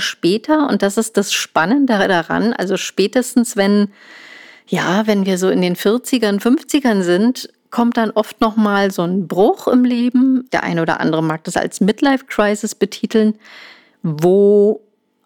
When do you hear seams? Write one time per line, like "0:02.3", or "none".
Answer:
none